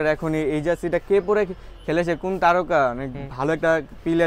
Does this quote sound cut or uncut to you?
uncut